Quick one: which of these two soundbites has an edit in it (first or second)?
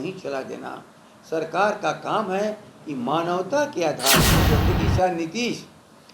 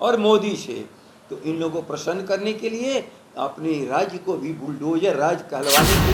first